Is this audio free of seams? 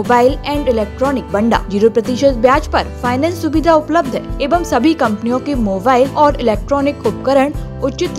no; 3 cuts; at 1.4 s, 4.4 s, 6.1 s

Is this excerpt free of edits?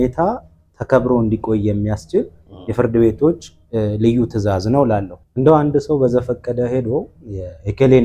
no; 1 cut; at 5.2 s

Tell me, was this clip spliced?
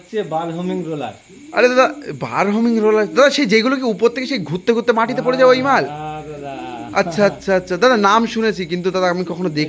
no; 0 cuts

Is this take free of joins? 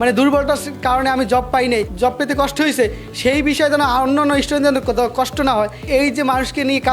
no; 1 cut; at 5.8 s

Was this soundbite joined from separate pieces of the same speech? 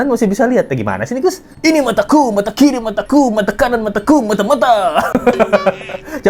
no; 0 cuts

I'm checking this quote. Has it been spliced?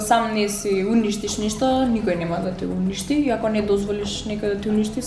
no; 0 cuts

